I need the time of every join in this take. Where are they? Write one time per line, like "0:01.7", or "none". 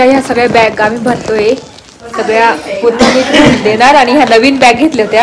none